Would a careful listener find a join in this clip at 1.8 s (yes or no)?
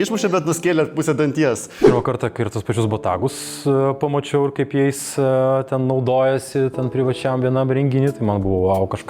yes